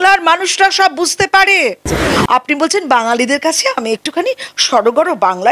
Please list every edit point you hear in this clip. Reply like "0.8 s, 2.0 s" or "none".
2.1 s

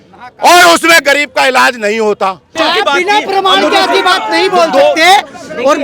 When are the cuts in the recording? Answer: 2.5 s

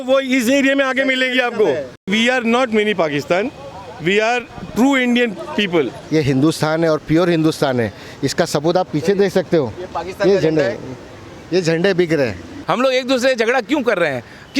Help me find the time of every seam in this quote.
2.1 s, 6.0 s, 12.5 s

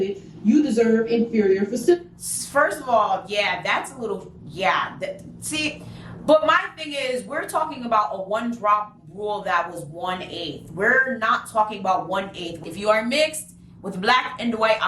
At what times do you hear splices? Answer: 12.5 s

